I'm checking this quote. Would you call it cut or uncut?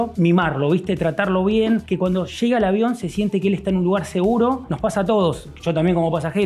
uncut